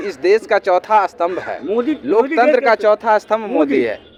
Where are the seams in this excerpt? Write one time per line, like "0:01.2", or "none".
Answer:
none